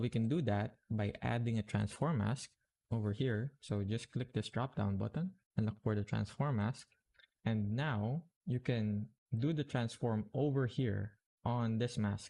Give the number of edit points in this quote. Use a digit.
0